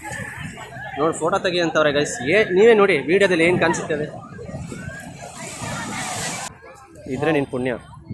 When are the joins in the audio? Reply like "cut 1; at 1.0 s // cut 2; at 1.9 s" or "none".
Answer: cut 1; at 6.5 s